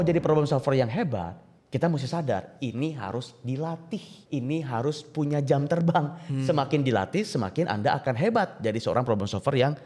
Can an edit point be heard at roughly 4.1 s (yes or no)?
yes